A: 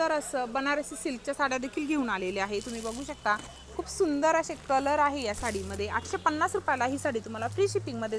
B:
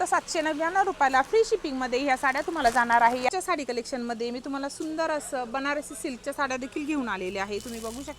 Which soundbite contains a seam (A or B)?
B